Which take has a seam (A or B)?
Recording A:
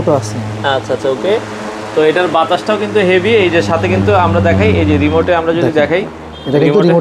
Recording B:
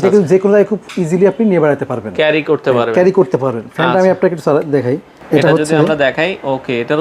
B